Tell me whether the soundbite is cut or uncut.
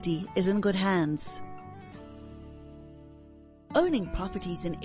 cut